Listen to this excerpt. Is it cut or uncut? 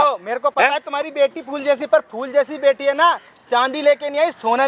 uncut